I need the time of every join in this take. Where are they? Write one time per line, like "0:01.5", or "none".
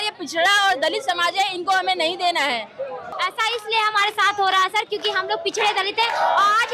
0:03.0